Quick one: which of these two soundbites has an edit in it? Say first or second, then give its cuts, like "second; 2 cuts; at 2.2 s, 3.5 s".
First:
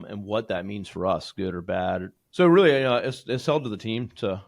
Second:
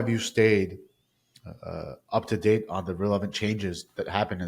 first; 1 cut; at 2.2 s